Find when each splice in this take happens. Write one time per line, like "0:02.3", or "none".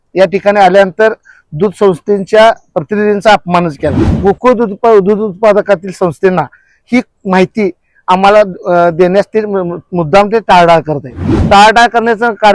0:04.0
0:11.4